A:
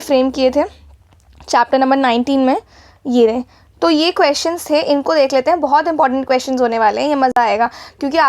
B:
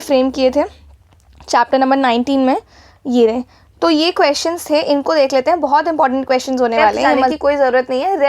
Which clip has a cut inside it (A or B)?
B